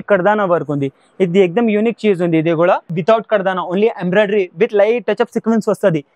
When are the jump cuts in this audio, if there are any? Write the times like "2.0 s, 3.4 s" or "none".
2.9 s